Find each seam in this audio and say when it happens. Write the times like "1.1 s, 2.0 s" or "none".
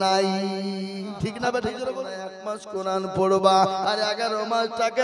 2.1 s

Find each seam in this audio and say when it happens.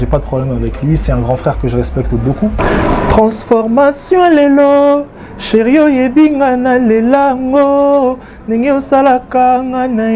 none

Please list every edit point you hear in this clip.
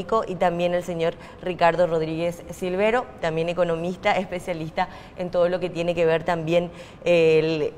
5.2 s

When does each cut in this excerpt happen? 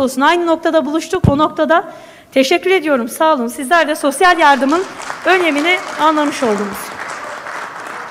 none

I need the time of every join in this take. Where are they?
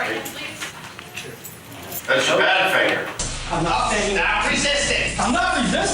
3.2 s

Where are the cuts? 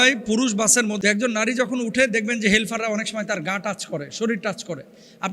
1.0 s

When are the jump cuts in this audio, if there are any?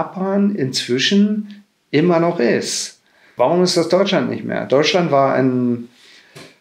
3.3 s

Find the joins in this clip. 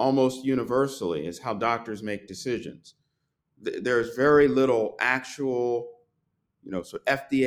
none

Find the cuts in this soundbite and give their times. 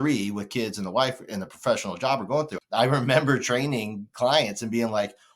2.6 s

